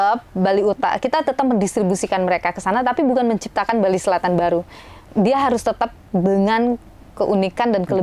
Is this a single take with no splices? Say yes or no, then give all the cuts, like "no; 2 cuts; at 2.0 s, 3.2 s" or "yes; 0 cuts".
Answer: yes; 0 cuts